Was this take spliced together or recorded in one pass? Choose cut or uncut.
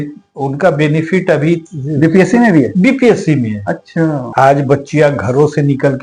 cut